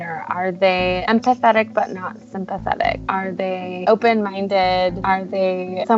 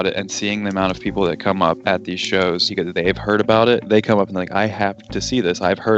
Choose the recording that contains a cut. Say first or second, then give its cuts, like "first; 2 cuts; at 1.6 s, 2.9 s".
second; 1 cut; at 2.6 s